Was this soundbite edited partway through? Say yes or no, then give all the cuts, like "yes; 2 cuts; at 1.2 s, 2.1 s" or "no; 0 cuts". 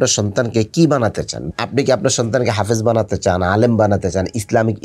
yes; 1 cut; at 1.4 s